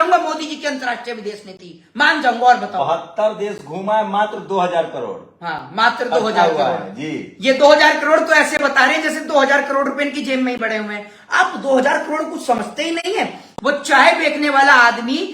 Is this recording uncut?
yes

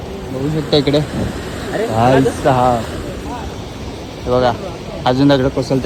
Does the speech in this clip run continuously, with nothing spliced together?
yes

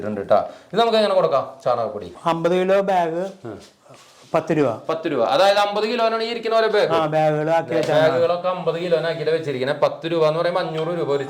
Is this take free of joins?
yes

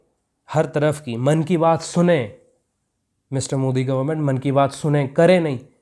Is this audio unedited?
yes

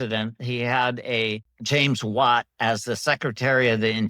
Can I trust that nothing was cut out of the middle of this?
no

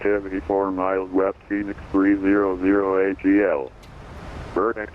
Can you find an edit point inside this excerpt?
yes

